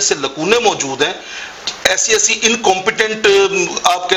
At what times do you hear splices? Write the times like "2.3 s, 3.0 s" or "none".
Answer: none